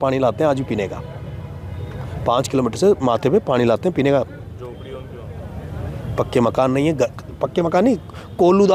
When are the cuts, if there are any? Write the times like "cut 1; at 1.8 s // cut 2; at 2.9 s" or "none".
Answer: none